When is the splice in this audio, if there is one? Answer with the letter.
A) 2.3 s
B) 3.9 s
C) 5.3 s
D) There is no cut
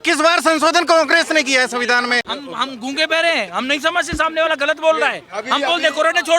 A